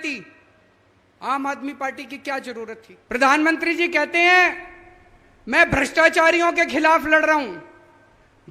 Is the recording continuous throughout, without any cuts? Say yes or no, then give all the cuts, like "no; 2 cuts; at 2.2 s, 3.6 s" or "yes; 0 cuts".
no; 1 cut; at 2.9 s